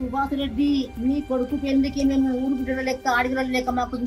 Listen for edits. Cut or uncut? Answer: cut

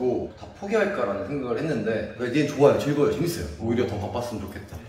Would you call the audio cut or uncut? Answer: cut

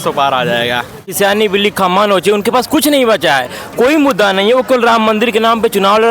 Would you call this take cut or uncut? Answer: cut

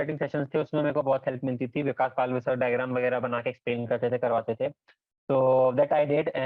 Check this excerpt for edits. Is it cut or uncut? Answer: uncut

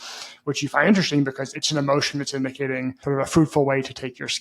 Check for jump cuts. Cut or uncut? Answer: cut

